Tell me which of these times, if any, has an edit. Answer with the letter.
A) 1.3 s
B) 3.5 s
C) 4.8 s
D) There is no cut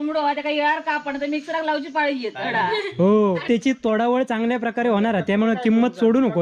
B